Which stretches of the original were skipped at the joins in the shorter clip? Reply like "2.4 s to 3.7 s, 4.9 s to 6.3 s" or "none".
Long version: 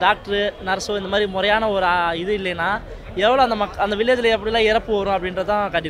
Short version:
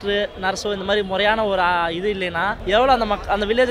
2.8 s to 3.1 s